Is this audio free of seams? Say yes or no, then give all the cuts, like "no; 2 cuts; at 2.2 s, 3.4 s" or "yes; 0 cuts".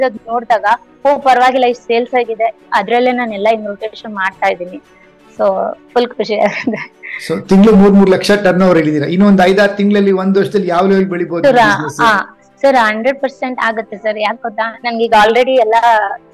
yes; 0 cuts